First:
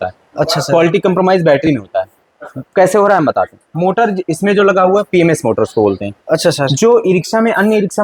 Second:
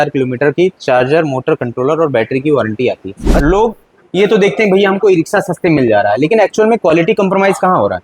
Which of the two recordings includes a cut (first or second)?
second